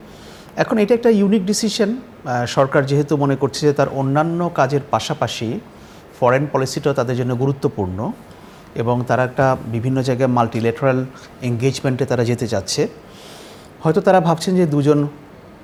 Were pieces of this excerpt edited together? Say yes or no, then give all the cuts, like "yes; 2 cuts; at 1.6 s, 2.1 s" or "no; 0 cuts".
no; 0 cuts